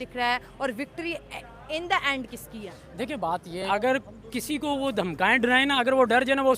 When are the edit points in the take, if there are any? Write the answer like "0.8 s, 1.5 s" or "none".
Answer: 3.7 s